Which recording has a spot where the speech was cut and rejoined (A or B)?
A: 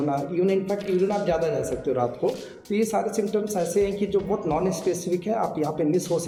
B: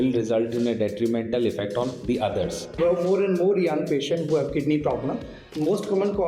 B